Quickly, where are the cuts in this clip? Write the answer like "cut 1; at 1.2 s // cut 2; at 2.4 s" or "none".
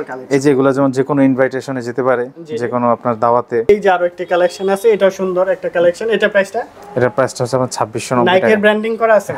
cut 1; at 3.7 s